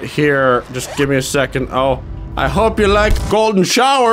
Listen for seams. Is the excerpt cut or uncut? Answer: cut